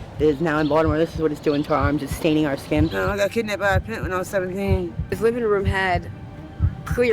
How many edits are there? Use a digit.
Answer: 2